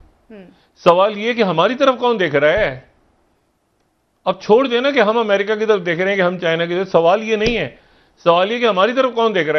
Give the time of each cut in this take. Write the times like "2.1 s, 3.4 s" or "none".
none